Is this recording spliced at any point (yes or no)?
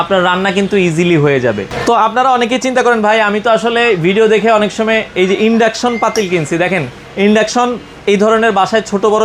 no